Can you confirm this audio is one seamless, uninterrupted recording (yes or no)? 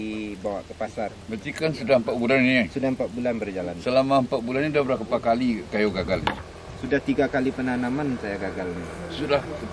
yes